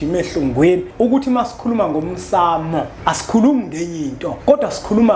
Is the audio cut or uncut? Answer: cut